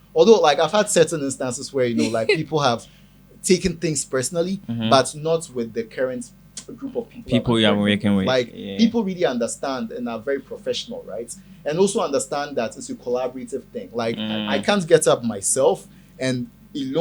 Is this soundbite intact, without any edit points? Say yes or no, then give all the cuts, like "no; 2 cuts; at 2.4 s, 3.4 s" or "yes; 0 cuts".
yes; 0 cuts